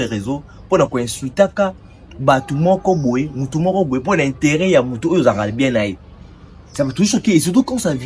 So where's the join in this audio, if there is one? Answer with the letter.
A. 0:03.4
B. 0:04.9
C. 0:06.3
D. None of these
D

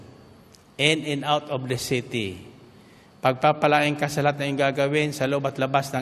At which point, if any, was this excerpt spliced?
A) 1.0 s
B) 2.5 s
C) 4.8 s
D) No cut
D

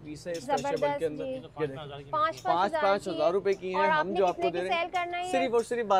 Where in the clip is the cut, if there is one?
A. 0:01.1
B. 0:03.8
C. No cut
C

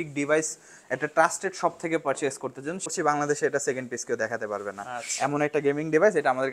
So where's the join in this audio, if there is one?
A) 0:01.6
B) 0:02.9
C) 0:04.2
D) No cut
B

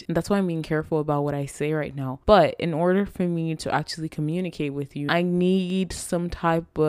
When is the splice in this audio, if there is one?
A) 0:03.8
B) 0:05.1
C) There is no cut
B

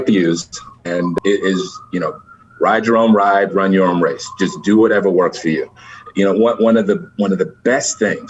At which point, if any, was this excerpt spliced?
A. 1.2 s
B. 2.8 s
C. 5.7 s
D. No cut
A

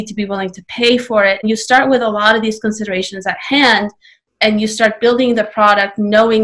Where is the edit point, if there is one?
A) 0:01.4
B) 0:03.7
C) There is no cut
A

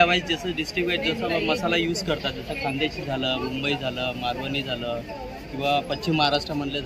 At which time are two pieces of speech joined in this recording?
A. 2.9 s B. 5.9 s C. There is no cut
C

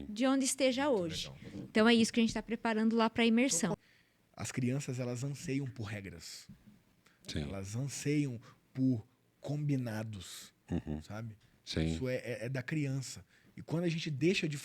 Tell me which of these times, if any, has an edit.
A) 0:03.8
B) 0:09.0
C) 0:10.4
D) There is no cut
A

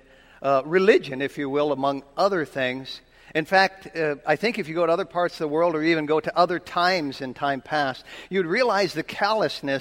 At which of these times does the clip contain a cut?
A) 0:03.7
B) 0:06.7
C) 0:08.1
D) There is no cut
D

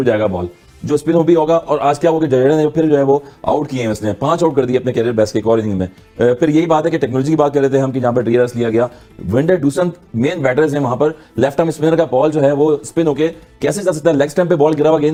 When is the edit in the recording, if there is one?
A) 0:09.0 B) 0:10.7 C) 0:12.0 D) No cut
D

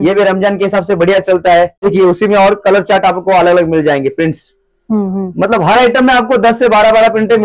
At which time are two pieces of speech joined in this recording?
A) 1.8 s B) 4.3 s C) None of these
A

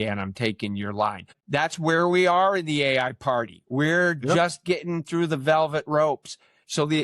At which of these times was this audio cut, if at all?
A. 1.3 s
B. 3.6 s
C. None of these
A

